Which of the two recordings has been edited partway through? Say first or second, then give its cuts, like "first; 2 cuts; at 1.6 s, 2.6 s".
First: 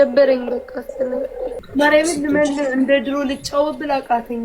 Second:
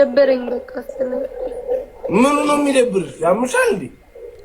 first; 1 cut; at 1.6 s